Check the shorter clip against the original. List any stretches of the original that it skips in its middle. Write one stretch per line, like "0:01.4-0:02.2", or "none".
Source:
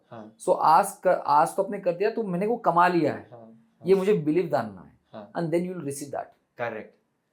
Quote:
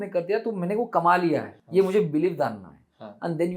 0:03.3-0:03.7